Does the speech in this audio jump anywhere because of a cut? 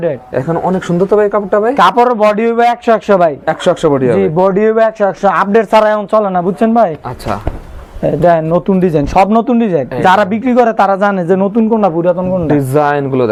no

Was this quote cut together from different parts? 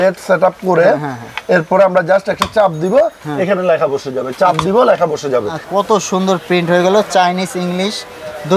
yes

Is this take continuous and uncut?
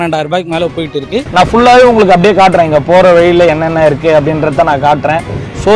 no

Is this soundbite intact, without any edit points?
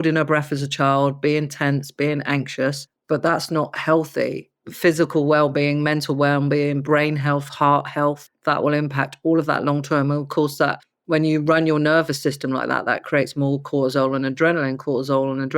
no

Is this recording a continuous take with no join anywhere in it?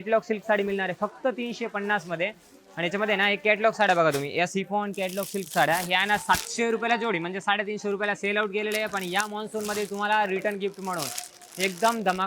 yes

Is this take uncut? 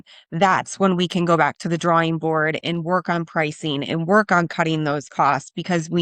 yes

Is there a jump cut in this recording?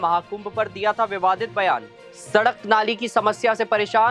yes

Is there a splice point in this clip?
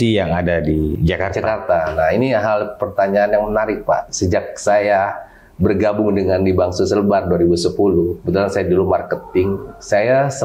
yes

